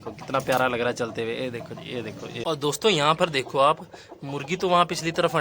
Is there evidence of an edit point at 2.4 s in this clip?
yes; 1 cut; at 2.4 s

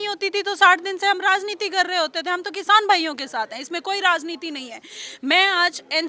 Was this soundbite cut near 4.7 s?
no; 0 cuts

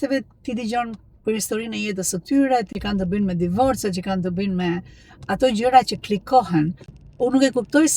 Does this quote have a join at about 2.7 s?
yes; 2 cuts; at 2.7 s, 6.8 s

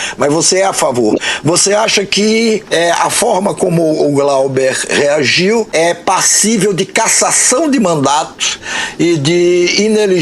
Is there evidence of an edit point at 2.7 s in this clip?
yes; 2 cuts; at 2.7 s, 5.7 s

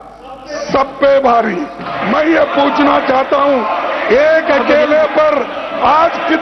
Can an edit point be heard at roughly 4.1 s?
no; 1 cut; at 1.9 s

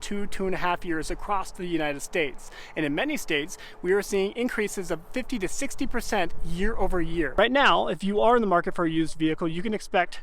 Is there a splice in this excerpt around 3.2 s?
no; 1 cut; at 7.3 s

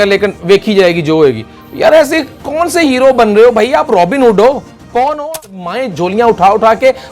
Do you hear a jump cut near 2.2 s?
no; 1 cut; at 5.2 s

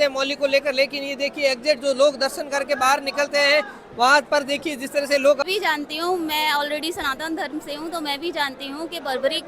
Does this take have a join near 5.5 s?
yes; 1 cut; at 5.5 s

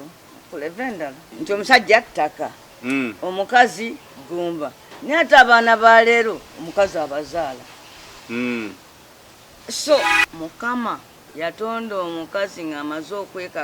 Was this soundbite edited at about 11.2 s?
yes; 3 cuts; at 1.2 s, 10.2 s, 11.2 s

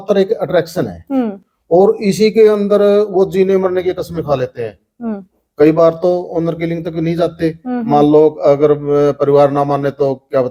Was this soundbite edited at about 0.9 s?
no; 0 cuts

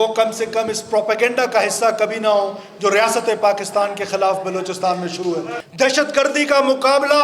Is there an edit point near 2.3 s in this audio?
no; 1 cut; at 5.6 s

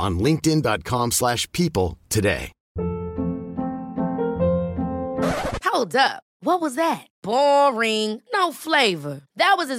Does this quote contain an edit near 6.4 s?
no; 1 cut; at 2.7 s

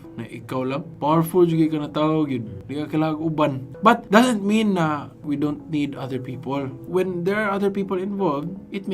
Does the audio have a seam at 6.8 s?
yes; 2 cuts; at 3.7 s, 6.8 s

